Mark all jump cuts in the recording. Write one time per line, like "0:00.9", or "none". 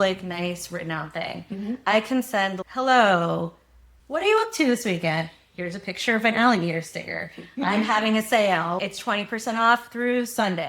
0:08.8